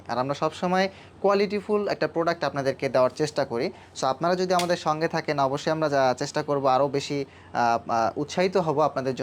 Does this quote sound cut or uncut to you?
uncut